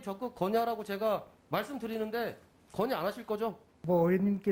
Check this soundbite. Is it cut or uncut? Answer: uncut